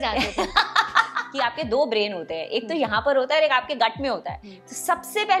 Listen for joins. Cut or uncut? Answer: cut